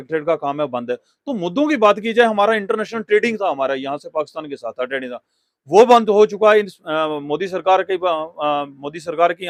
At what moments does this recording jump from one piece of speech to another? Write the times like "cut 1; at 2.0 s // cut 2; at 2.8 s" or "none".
none